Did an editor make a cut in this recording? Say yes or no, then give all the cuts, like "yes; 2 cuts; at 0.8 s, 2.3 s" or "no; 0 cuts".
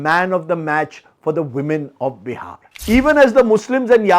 yes; 1 cut; at 2.7 s